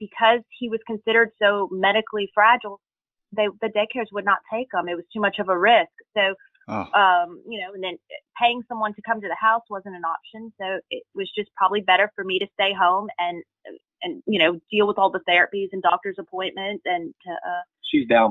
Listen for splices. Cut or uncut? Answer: uncut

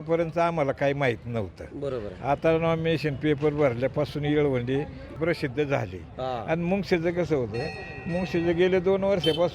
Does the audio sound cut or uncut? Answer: cut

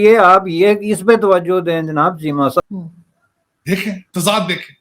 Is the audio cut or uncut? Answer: cut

